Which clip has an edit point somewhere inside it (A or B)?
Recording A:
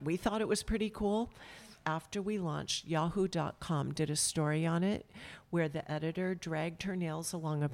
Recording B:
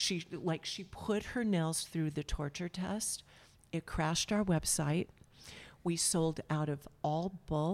A